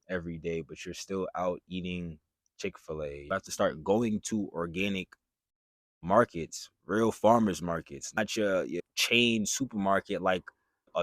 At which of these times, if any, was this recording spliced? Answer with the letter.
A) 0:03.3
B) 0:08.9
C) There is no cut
A